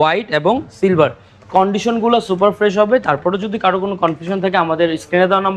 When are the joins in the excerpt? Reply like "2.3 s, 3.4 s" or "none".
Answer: none